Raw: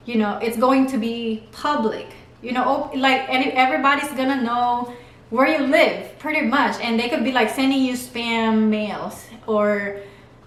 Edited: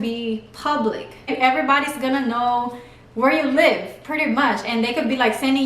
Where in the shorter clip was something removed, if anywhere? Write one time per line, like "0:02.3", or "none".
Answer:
0:01.3

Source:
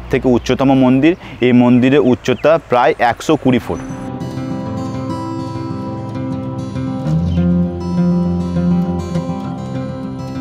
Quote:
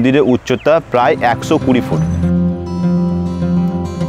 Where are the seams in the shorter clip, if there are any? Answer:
0:01.9

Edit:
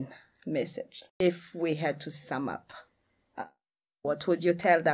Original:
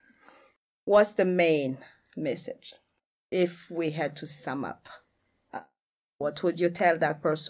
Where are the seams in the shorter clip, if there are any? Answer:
0:01.0

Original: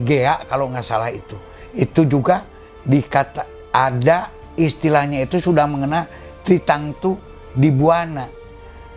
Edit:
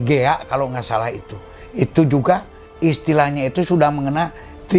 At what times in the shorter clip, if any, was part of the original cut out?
0:02.6

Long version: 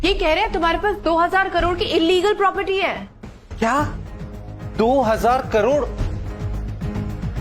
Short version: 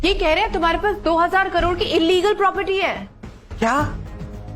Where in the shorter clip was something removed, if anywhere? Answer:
none

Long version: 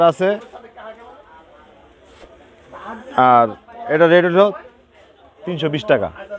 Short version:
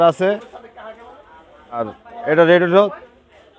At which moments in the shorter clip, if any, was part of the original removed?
0:02.0

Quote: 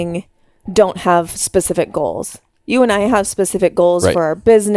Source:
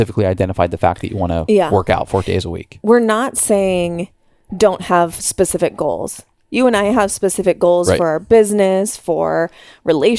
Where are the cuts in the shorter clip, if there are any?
none

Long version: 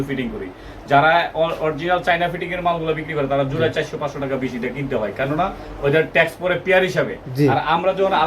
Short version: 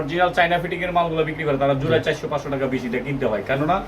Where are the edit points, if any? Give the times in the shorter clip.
none

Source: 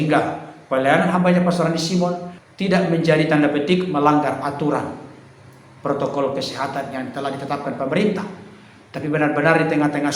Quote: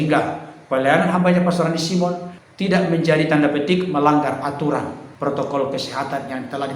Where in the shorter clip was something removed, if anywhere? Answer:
0:05.0

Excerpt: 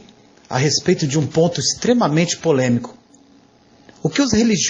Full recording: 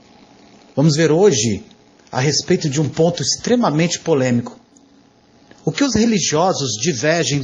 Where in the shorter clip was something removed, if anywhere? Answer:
none

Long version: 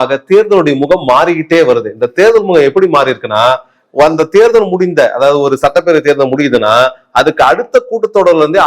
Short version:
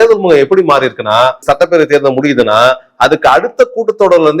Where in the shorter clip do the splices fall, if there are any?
0:01.4

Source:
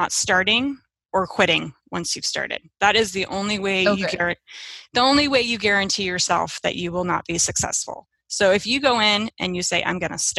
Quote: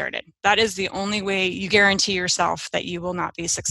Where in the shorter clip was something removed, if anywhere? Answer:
0:01.5

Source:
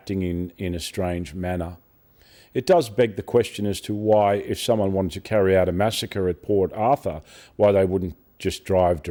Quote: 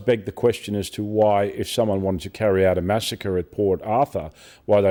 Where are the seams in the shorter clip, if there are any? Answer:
none

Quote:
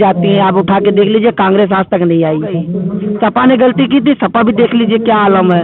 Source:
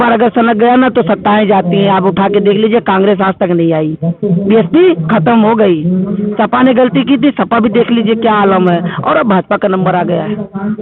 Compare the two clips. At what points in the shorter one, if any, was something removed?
0:02.7

